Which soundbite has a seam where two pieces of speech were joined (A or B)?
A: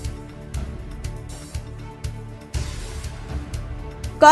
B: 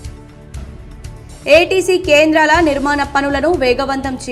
B